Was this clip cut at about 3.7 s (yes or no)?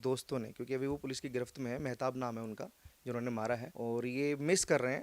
yes